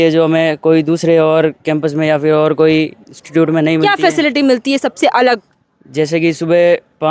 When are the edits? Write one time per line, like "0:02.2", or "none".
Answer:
none